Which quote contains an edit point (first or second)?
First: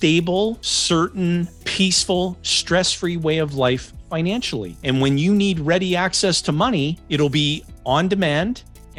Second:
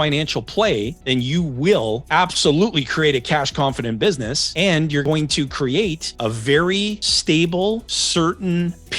second